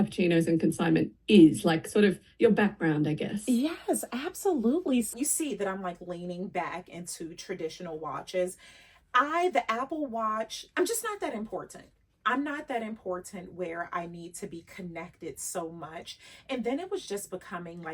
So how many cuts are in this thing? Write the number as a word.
two